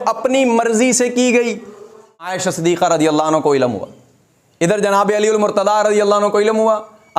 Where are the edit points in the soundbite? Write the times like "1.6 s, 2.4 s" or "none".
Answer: 2.2 s

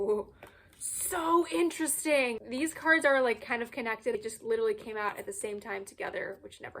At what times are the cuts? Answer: 2.4 s, 4.1 s

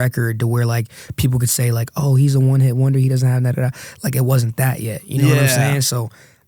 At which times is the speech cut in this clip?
none

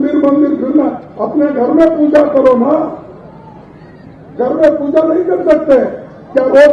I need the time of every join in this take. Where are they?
none

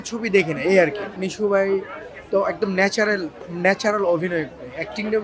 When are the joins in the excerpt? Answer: 1.1 s

